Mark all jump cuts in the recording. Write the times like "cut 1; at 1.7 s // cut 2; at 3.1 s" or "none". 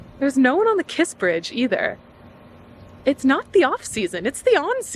none